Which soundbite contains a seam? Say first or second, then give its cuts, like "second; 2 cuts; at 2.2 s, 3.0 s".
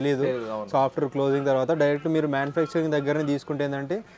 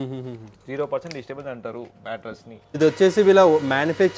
second; 1 cut; at 2.7 s